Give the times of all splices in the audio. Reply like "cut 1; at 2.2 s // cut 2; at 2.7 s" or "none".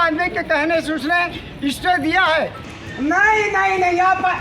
cut 1; at 2.6 s